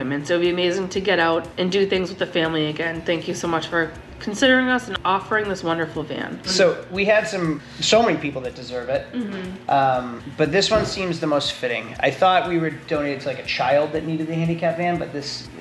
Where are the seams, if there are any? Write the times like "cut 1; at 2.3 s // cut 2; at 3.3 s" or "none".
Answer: none